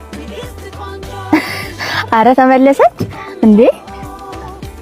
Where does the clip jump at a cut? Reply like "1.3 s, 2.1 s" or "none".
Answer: 1.3 s

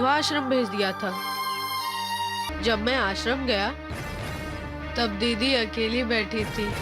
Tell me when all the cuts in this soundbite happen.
2.5 s

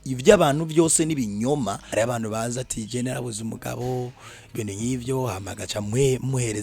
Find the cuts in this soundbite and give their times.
1.8 s

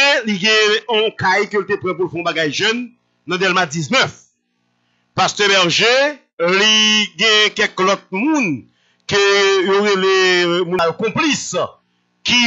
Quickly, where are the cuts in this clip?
10.8 s

